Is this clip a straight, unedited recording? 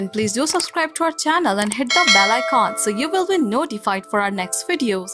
yes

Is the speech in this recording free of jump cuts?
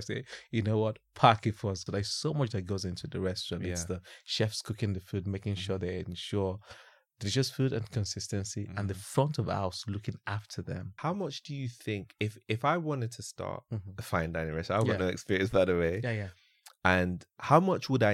no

